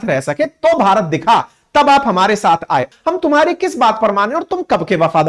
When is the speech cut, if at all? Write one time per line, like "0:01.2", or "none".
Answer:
0:02.9